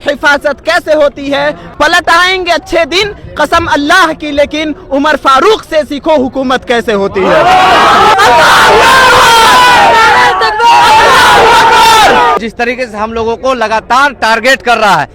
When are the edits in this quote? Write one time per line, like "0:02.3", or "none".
0:01.6
0:08.1
0:12.4